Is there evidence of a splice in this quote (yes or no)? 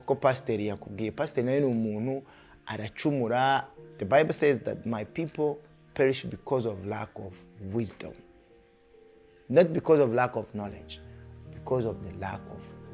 yes